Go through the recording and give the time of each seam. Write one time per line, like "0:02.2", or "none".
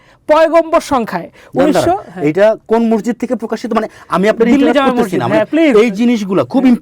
none